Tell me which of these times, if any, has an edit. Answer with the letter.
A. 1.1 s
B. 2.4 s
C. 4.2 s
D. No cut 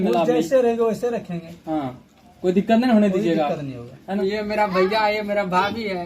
C